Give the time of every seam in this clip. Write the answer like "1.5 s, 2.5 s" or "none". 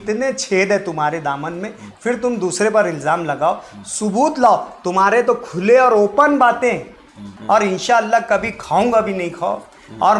7.3 s